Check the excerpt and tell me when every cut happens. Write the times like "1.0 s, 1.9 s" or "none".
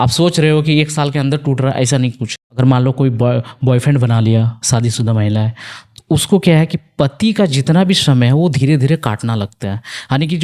2.5 s